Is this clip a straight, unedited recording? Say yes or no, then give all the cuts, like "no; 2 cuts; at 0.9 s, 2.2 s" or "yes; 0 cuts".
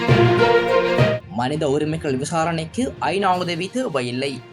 no; 1 cut; at 1.2 s